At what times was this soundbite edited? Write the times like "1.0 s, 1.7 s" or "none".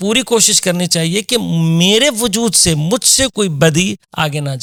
none